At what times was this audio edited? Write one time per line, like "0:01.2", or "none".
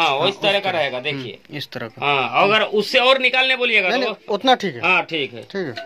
none